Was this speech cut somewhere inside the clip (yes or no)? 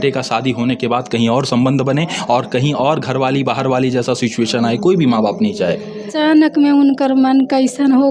yes